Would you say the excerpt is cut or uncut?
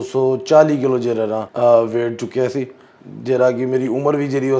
cut